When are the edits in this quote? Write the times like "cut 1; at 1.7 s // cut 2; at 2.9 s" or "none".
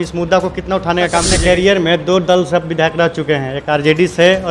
cut 1; at 1.3 s

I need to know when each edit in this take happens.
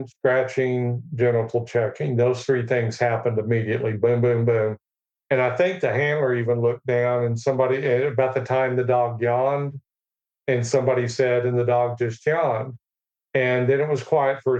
none

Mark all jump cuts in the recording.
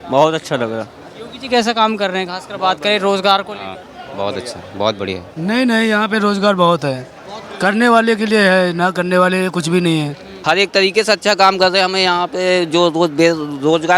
cut 1; at 5.3 s // cut 2; at 10.3 s

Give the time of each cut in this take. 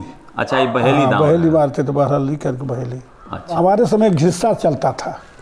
cut 1; at 3.6 s

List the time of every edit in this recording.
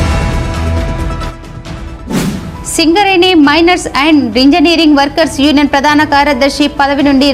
cut 1; at 1.0 s

